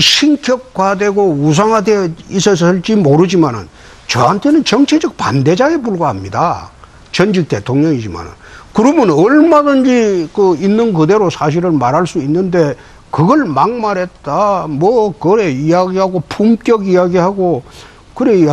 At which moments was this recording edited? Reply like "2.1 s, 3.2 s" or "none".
none